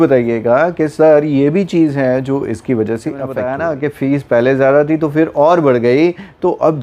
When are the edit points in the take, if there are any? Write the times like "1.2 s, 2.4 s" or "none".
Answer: 3.3 s